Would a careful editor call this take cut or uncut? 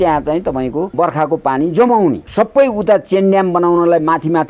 cut